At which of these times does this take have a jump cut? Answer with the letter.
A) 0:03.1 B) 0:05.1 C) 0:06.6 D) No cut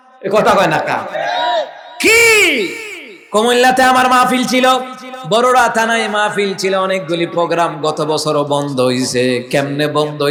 D